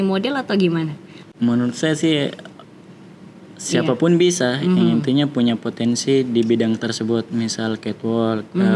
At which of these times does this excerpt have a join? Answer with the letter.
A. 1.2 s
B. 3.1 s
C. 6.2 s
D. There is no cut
A